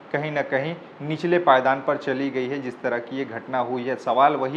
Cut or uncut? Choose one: uncut